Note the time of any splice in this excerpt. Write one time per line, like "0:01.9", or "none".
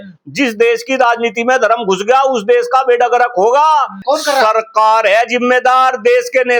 0:04.0